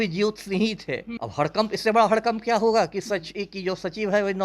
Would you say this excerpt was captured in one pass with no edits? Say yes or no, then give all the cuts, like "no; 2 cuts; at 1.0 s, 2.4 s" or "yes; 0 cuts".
no; 1 cut; at 1.1 s